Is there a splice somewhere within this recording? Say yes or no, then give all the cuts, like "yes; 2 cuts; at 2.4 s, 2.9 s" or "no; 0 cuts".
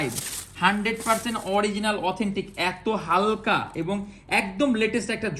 no; 0 cuts